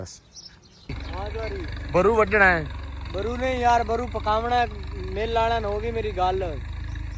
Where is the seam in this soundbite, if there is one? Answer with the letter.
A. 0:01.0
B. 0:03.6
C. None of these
A